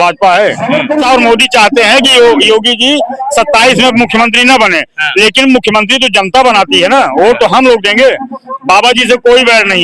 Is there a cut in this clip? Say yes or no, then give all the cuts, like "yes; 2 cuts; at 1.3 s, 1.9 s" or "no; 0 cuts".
yes; 1 cut; at 1.0 s